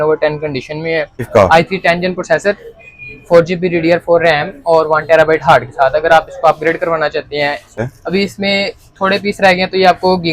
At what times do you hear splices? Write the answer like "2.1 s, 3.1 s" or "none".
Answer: 1.3 s, 7.8 s